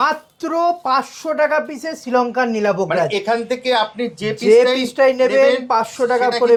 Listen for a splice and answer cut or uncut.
uncut